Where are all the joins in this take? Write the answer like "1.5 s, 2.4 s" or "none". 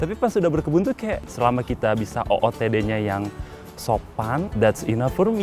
1.3 s, 4.5 s